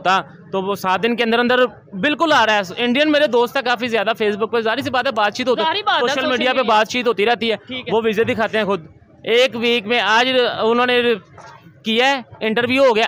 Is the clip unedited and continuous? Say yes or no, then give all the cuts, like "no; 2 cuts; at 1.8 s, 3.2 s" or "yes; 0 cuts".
yes; 0 cuts